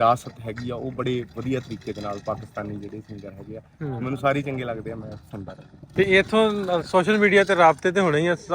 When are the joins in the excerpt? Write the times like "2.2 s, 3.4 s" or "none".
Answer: none